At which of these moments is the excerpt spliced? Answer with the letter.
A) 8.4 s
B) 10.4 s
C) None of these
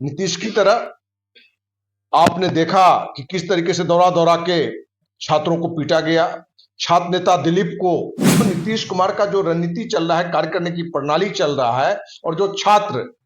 A